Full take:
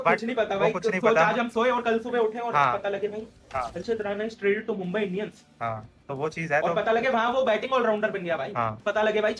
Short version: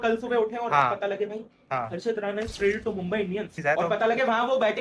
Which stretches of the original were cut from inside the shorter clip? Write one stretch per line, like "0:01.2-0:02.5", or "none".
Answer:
0:05.4-0:06.4